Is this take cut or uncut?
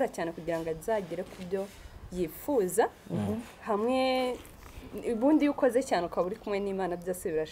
uncut